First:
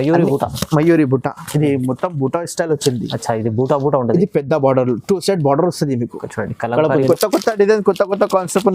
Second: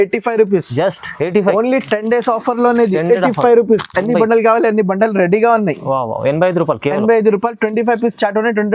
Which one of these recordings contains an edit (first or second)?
first